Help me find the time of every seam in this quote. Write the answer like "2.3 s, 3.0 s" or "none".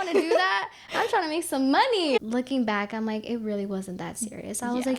2.2 s